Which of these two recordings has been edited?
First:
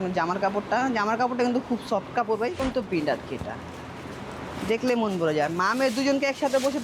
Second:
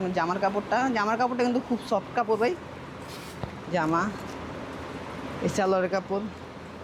first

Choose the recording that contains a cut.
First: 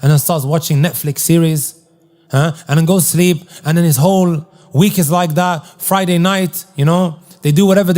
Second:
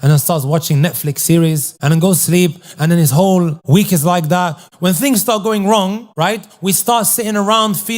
second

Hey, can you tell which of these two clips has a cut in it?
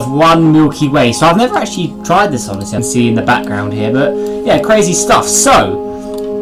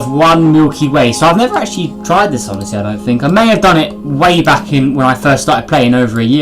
second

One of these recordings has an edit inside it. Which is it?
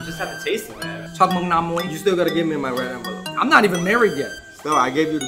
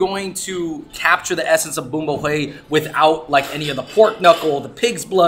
first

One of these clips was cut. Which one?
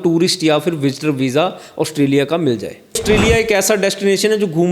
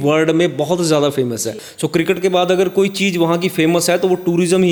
first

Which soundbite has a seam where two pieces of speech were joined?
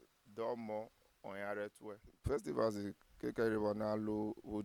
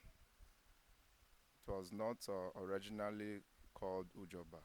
first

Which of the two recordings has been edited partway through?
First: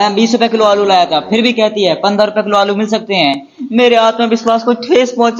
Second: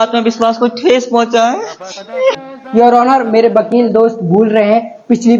second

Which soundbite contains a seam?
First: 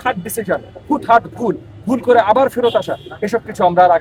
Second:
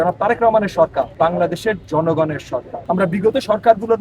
second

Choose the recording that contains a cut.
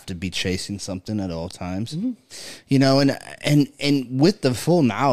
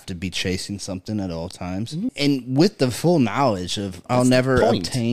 second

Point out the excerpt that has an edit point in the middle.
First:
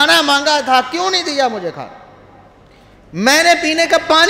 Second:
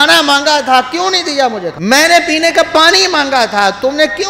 second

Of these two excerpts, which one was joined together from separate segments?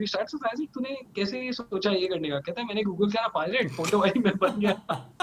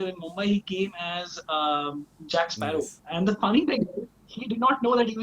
second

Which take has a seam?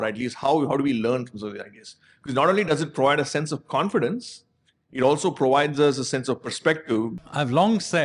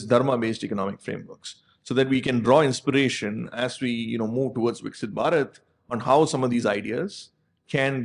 first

